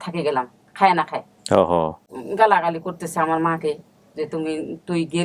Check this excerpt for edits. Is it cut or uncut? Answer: cut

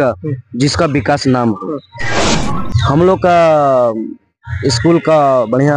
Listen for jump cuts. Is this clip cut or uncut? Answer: cut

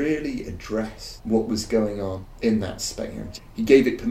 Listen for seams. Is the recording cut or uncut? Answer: cut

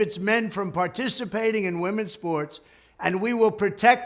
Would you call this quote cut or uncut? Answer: uncut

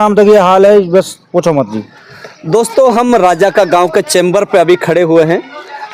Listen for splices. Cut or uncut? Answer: uncut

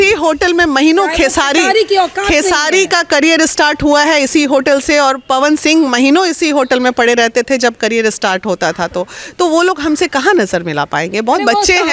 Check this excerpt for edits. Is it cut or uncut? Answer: uncut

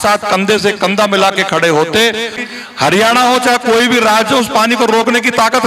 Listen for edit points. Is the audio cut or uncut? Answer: cut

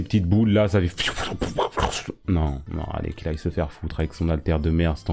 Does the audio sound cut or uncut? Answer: uncut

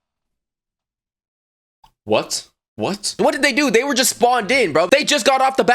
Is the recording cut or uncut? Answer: cut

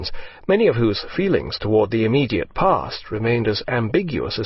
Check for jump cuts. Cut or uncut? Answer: cut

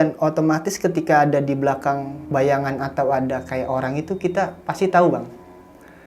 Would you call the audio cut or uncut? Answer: cut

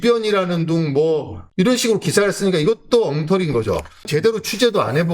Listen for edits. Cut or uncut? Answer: cut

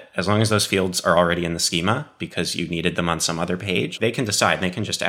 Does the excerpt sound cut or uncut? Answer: cut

